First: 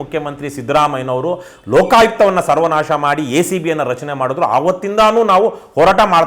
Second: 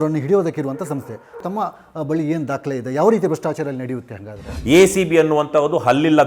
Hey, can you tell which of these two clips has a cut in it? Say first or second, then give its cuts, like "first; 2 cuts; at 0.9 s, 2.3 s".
second; 2 cuts; at 1.4 s, 4.5 s